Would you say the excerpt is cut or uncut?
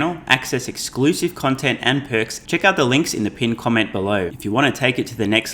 cut